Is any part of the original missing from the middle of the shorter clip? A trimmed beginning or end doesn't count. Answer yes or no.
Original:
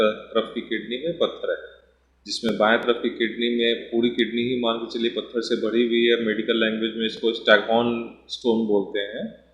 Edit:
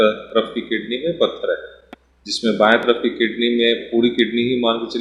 no